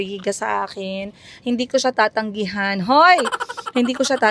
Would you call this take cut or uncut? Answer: uncut